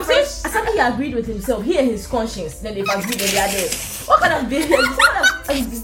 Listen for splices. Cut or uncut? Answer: uncut